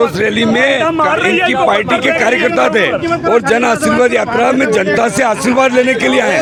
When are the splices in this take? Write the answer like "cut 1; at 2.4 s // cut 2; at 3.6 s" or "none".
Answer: none